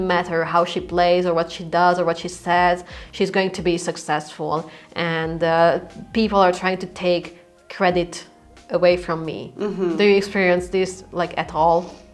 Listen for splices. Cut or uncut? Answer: uncut